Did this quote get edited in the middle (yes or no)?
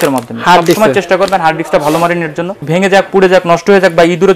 yes